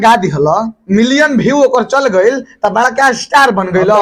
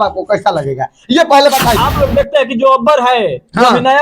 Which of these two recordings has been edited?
second; 1 cut; at 1.8 s

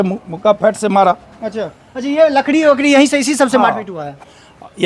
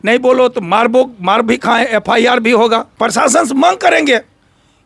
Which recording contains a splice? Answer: second; 1 cut; at 2.9 s

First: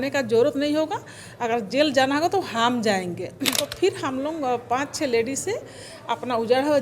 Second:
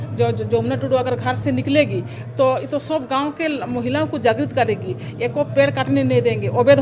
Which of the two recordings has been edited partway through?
first; 1 cut; at 3.6 s

